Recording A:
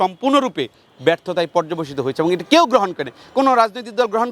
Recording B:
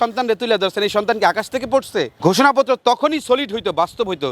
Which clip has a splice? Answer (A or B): B